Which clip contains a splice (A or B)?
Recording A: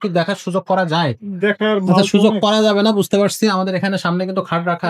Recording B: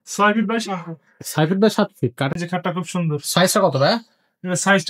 B